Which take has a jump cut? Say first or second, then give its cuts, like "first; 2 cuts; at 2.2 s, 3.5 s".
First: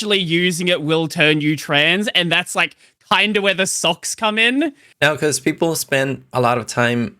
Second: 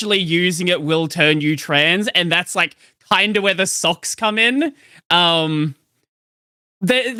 first; 1 cut; at 4.9 s